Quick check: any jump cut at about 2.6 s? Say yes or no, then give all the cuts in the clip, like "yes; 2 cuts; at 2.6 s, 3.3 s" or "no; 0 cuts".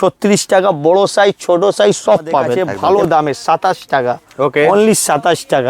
yes; 1 cut; at 2.6 s